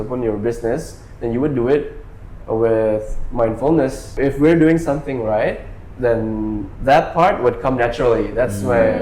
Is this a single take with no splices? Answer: no; 1 cut; at 4.1 s

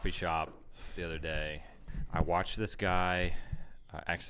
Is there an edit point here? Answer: yes; 1 cut; at 1.8 s

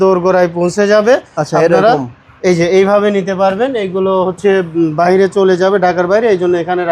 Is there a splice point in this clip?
no; 0 cuts

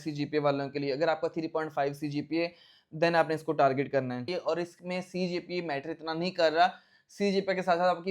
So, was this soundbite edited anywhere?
yes; 1 cut; at 4.3 s

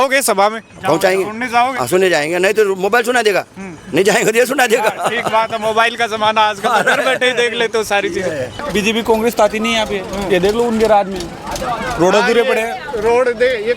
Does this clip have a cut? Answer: yes; 1 cut; at 8.6 s

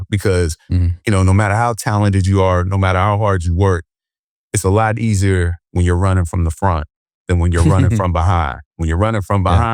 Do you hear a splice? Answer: no; 0 cuts

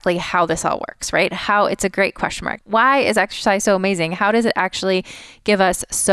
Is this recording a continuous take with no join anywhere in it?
no; 1 cut; at 2.5 s

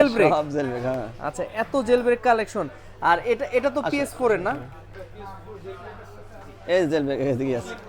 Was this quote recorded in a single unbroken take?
yes; 0 cuts

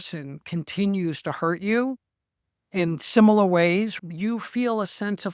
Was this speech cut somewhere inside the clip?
no; 0 cuts

